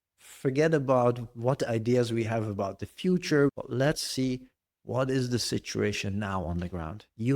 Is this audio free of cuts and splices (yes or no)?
no